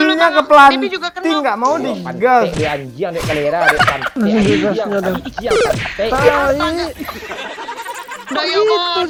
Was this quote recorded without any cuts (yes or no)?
yes